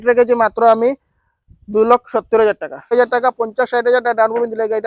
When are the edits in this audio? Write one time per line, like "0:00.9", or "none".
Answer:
0:02.9

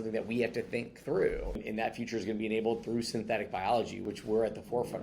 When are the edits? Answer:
0:01.6
0:04.0

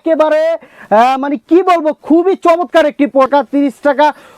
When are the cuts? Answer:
0:03.3

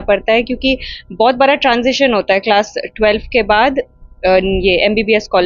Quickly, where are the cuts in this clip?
none

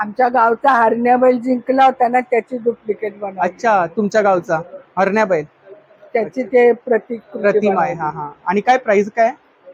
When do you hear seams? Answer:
none

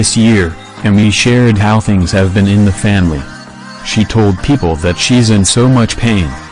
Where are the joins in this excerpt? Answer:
0:05.1

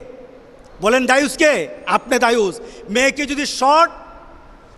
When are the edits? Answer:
none

